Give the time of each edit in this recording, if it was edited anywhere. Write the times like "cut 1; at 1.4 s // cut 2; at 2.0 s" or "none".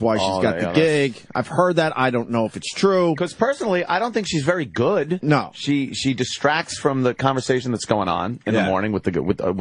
cut 1; at 7.0 s